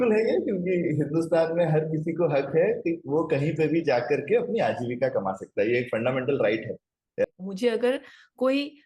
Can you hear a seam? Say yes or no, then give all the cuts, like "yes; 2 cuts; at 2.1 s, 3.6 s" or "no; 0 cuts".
yes; 1 cut; at 7.2 s